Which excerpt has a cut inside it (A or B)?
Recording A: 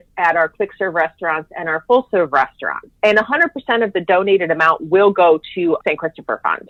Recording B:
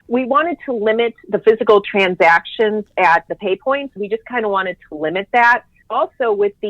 B